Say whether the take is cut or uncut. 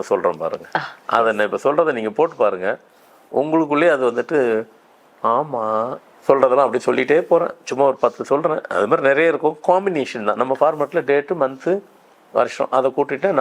cut